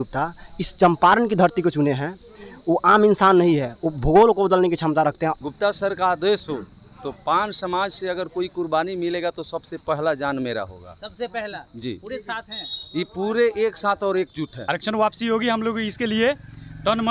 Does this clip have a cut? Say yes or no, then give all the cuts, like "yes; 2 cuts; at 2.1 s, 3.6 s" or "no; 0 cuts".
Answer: yes; 2 cuts; at 5.4 s, 14.6 s